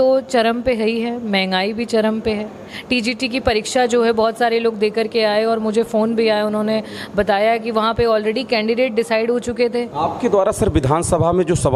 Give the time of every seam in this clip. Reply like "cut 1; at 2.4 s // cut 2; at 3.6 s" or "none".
cut 1; at 2.7 s // cut 2; at 9.9 s